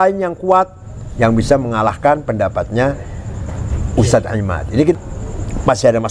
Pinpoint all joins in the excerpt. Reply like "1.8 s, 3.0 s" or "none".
4.9 s